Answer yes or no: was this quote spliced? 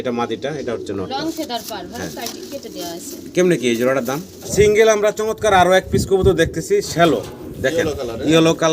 yes